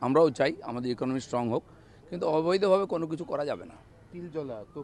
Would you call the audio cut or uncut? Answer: uncut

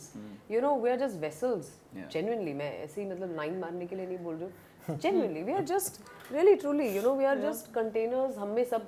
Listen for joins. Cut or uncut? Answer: uncut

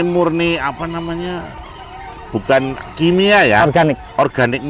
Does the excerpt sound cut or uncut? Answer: uncut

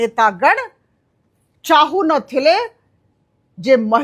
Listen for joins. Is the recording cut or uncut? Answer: uncut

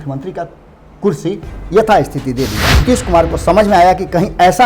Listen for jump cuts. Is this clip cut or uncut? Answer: cut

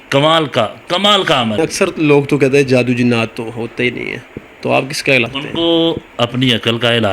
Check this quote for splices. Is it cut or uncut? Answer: cut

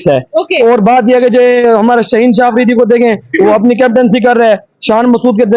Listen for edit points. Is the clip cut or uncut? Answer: uncut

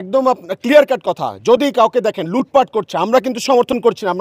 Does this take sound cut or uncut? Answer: uncut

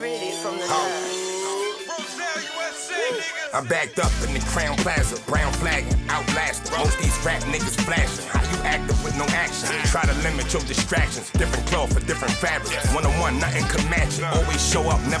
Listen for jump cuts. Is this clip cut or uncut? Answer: uncut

